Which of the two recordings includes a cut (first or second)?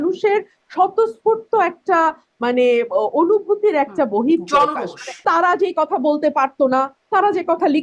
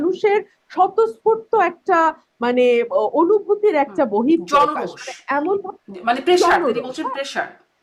first